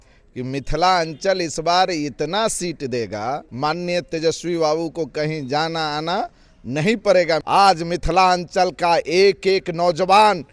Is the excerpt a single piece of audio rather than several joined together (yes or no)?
no